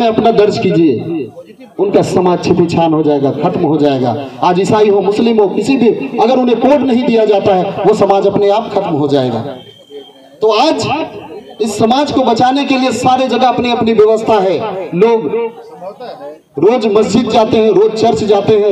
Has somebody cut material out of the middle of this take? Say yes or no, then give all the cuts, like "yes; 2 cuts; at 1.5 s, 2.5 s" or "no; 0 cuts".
no; 0 cuts